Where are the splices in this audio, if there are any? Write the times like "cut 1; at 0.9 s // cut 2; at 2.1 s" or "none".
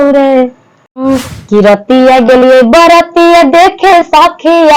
cut 1; at 1.0 s